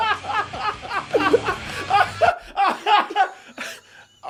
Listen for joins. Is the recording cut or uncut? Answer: uncut